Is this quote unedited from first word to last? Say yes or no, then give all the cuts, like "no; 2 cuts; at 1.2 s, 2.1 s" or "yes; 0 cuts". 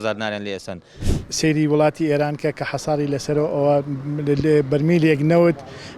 no; 1 cut; at 0.9 s